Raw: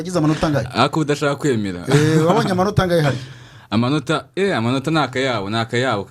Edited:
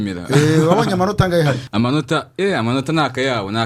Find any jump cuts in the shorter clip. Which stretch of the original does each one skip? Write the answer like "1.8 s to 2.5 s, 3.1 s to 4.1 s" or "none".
3.2 s to 3.6 s